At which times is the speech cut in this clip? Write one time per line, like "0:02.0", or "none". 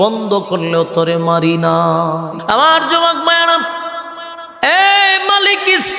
0:02.3